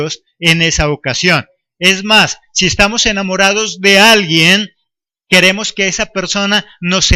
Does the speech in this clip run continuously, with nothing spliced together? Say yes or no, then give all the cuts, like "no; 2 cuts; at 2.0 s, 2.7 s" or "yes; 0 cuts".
yes; 0 cuts